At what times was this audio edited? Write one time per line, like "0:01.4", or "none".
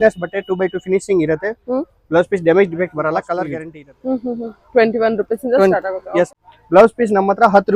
0:03.6
0:06.4